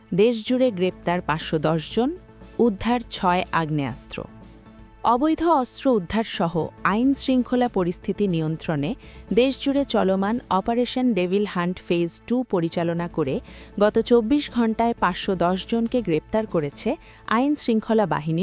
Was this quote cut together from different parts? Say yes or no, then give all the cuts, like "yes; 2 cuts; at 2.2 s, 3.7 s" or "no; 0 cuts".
no; 0 cuts